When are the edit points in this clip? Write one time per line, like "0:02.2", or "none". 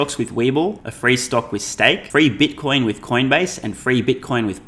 0:00.9
0:02.0